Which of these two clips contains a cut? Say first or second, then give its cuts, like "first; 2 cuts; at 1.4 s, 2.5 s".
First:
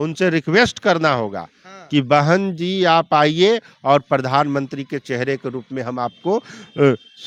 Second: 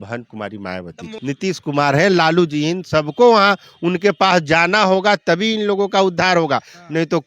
second; 1 cut; at 1.1 s